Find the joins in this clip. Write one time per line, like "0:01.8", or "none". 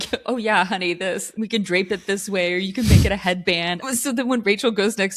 0:01.3
0:03.8